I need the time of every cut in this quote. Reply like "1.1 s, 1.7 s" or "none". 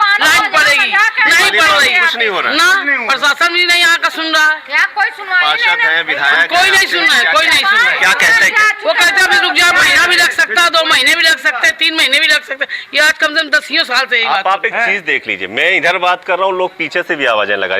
none